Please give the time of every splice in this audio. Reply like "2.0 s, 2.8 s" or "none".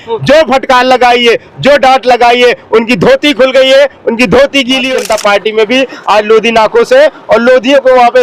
4.9 s